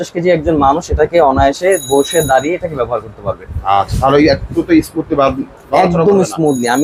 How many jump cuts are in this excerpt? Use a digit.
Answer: 0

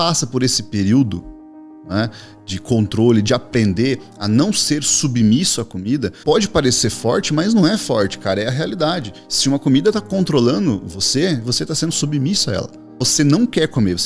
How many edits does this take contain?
2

